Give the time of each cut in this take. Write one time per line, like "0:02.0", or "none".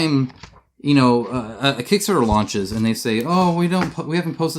none